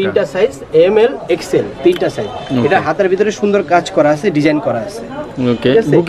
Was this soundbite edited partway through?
no; 0 cuts

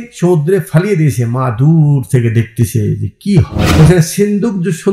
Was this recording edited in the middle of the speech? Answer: yes; 1 cut; at 3.6 s

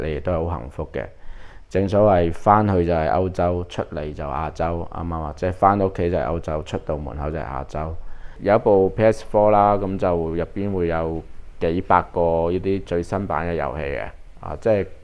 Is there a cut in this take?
yes; 1 cut; at 8.3 s

